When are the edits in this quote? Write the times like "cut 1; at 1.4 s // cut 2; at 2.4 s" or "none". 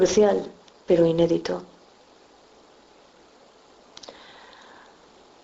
none